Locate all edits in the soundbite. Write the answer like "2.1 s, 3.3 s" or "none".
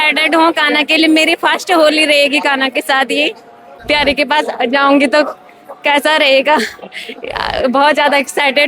3.8 s

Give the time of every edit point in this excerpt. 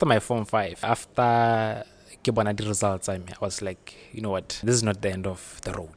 0.8 s, 4.6 s

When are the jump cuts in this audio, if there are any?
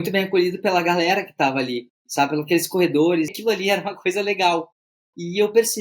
3.3 s

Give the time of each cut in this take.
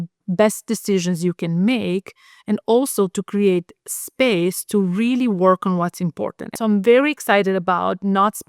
6.4 s

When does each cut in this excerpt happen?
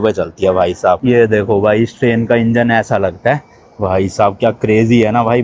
1.0 s

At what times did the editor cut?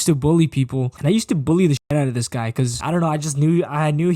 1.0 s

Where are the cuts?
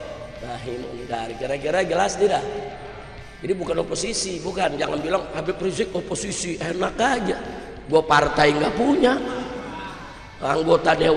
none

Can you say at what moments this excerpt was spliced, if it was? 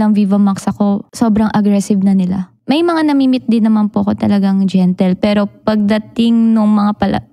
1.1 s, 2.5 s

